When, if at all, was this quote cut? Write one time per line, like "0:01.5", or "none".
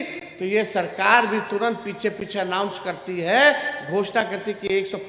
none